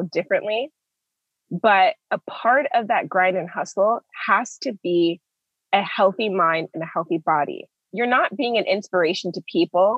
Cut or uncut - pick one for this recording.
cut